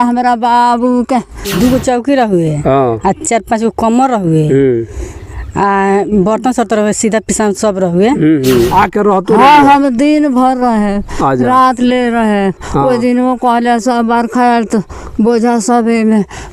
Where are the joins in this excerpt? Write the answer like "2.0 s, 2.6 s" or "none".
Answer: 1.5 s, 8.7 s

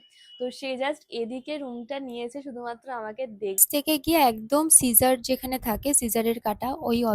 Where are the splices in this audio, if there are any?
3.6 s

